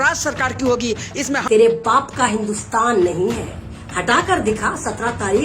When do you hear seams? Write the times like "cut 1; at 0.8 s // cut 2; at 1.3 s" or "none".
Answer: cut 1; at 1.4 s